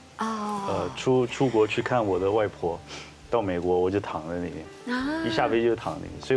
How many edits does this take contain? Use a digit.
0